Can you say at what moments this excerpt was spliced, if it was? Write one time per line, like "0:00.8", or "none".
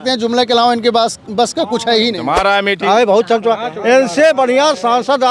0:02.2